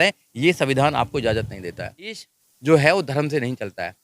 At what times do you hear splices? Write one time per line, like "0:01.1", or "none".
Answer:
0:02.3